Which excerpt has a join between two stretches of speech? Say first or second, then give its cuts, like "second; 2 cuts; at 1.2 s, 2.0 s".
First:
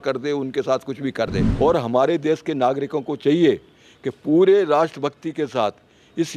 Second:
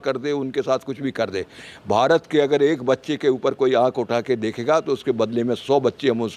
first; 1 cut; at 1.4 s